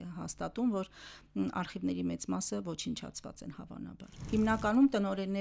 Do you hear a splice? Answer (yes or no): yes